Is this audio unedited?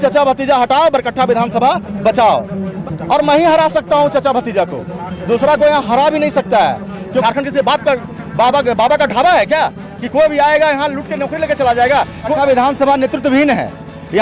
no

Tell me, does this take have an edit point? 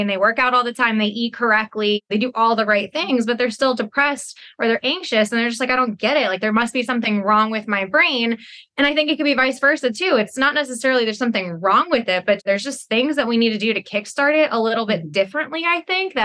yes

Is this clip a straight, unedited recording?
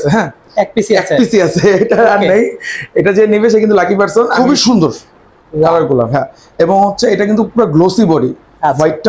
no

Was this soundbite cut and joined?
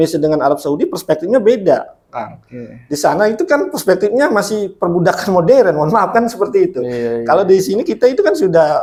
no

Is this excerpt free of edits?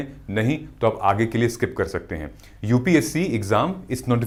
yes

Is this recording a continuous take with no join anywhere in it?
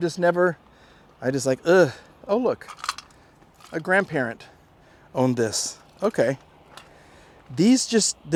yes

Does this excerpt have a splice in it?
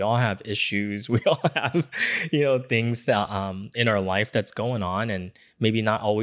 no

